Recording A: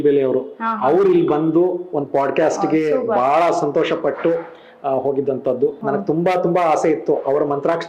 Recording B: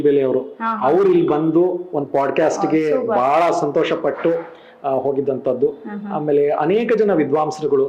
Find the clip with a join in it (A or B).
A